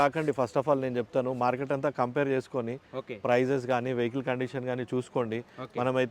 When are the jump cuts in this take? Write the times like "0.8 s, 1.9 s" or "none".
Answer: none